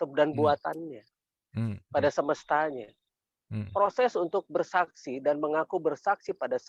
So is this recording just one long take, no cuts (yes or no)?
yes